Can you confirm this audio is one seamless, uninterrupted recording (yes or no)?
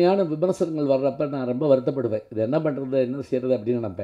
yes